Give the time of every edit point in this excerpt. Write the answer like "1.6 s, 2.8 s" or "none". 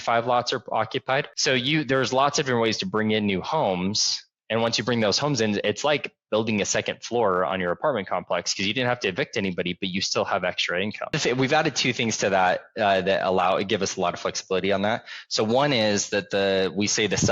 11.2 s